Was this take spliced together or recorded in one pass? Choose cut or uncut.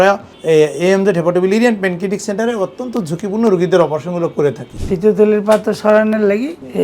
cut